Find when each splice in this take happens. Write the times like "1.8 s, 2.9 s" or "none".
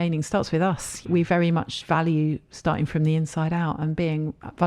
1.0 s